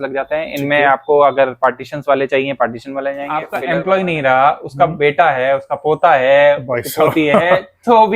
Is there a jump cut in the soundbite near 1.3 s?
no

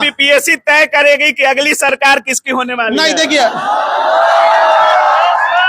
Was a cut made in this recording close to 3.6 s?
no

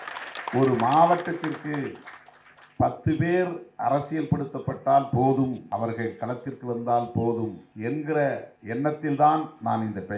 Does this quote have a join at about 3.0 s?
no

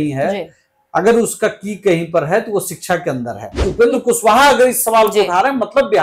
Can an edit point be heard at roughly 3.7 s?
yes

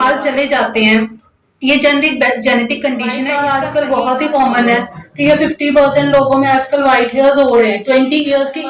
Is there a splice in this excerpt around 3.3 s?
yes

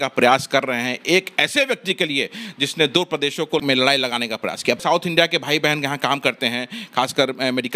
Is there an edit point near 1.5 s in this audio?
no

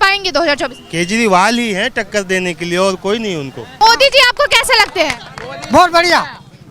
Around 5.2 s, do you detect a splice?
no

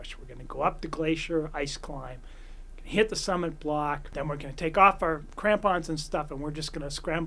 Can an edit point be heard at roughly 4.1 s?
yes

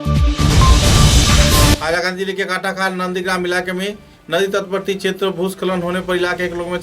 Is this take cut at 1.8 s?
yes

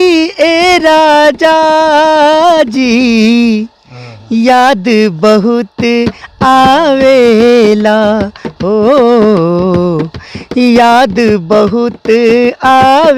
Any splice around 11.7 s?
no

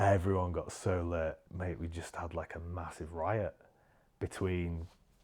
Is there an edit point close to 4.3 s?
no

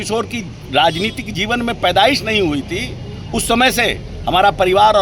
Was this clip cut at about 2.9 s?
no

